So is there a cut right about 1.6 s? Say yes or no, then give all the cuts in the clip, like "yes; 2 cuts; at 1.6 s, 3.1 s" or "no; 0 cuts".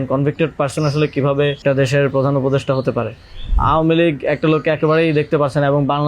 yes; 2 cuts; at 1.6 s, 3.5 s